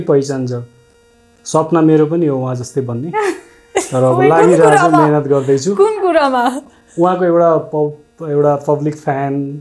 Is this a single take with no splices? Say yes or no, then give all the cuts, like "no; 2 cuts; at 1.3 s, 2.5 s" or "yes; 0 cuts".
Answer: yes; 0 cuts